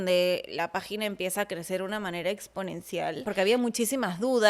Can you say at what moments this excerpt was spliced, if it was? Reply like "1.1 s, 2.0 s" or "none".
3.2 s